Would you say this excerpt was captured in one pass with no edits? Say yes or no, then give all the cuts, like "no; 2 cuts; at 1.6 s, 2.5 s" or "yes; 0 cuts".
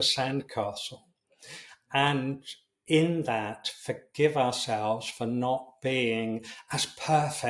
yes; 0 cuts